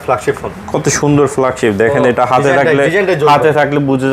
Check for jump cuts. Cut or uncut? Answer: uncut